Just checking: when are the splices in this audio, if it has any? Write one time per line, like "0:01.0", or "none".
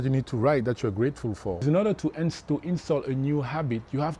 0:01.6